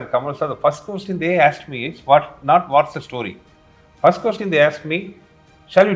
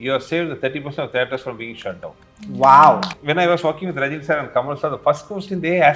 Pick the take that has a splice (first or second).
second